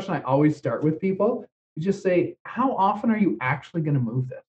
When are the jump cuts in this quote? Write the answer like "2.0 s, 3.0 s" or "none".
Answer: 1.5 s